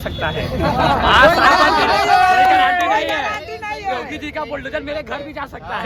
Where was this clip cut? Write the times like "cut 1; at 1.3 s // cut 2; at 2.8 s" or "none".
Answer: none